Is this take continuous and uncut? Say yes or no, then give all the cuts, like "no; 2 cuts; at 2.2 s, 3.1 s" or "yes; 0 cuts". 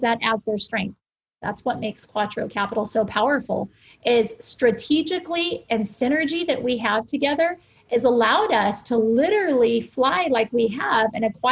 no; 1 cut; at 1.2 s